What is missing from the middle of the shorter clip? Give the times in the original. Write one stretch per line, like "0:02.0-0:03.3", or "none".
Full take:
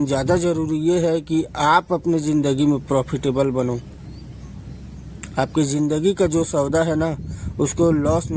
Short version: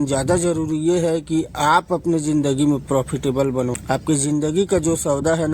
0:03.8-0:05.3